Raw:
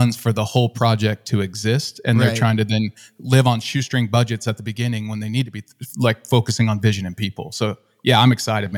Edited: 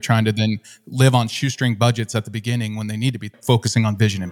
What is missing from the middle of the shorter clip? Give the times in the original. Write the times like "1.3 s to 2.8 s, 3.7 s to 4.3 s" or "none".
5.7 s to 6.2 s